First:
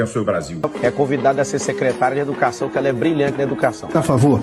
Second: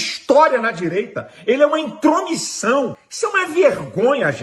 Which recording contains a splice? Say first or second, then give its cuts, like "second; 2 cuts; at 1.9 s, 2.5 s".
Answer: second; 1 cut; at 3.0 s